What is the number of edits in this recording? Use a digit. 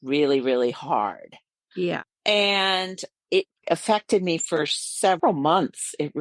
2